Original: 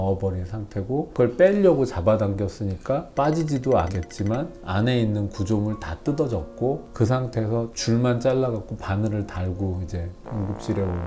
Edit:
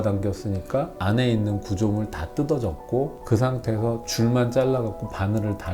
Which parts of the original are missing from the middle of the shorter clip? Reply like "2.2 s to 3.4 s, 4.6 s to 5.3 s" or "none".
3.1 s to 4.6 s